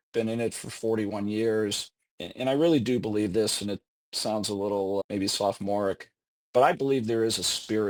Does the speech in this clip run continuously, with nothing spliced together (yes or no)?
yes